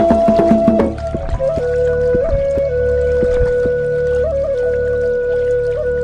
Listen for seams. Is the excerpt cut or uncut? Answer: uncut